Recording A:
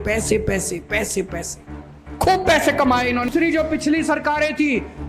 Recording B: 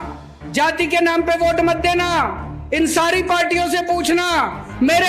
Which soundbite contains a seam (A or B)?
A